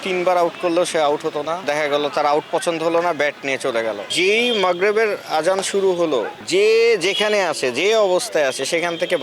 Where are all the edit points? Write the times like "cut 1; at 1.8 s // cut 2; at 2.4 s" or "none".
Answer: cut 1; at 1.6 s // cut 2; at 4.1 s